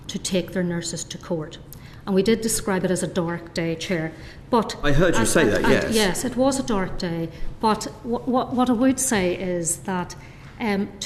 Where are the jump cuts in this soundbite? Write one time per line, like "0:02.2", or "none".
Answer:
none